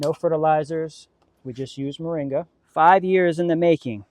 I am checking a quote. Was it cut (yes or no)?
yes